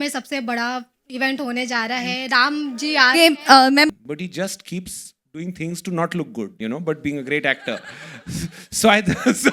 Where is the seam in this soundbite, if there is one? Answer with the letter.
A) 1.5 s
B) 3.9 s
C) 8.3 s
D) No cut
B